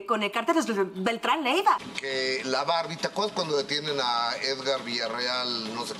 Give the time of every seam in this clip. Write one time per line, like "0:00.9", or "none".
0:01.8